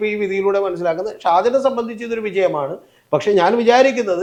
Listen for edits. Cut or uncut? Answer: uncut